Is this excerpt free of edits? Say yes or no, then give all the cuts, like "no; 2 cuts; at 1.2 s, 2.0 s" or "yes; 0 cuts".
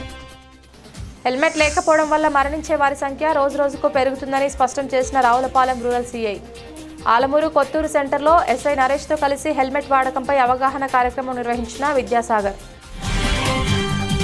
yes; 0 cuts